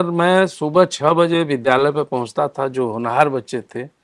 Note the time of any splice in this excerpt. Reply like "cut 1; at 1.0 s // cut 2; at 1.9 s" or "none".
none

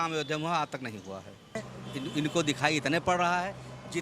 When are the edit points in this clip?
cut 1; at 1.7 s

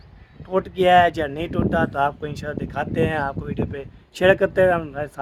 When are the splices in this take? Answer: none

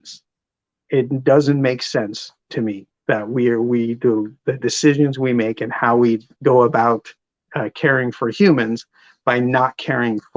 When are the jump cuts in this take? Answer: cut 1; at 6.3 s

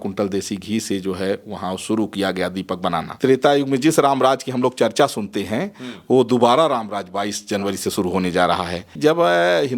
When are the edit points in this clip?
cut 1; at 3.1 s // cut 2; at 8.9 s

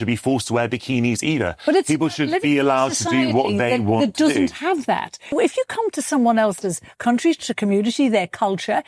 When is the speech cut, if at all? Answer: cut 1; at 5.3 s

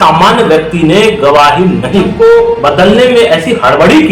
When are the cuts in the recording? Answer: cut 1; at 2.1 s

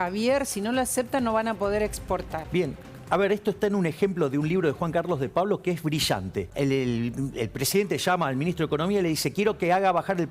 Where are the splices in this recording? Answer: cut 1; at 2.4 s // cut 2; at 6.5 s

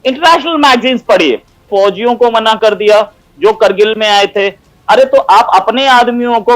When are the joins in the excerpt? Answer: cut 1; at 1.6 s

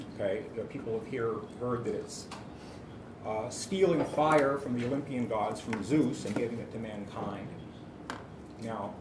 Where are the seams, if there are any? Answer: none

